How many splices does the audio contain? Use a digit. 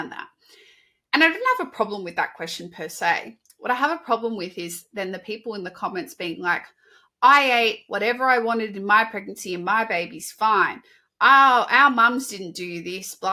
0